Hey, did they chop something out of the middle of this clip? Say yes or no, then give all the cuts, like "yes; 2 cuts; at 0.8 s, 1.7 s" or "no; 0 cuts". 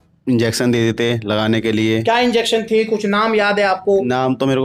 no; 0 cuts